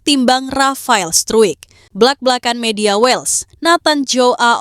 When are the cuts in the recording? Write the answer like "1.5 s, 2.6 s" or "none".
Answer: 1.8 s